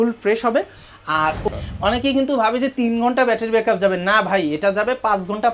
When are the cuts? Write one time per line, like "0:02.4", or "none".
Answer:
0:01.5